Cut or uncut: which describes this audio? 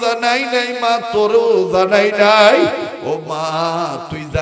uncut